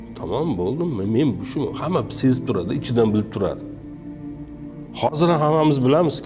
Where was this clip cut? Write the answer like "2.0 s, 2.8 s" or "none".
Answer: 3.6 s, 4.9 s

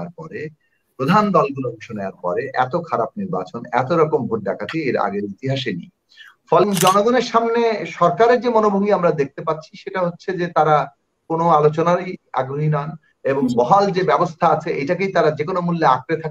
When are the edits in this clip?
6.6 s

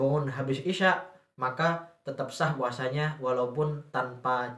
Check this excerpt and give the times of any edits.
none

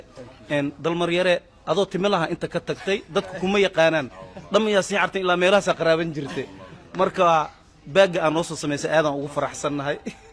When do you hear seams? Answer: none

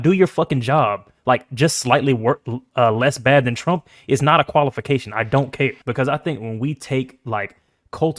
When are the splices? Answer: 5.8 s

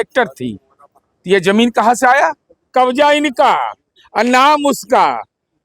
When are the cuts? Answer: 2.7 s

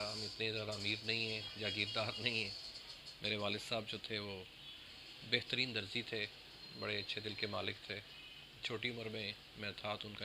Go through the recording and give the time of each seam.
none

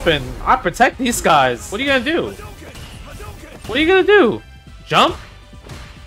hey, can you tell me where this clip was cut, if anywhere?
1.7 s

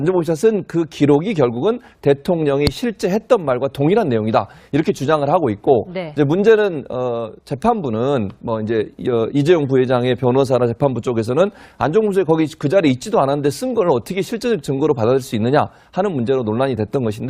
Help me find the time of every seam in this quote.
5.1 s

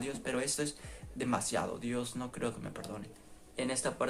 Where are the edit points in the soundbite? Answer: none

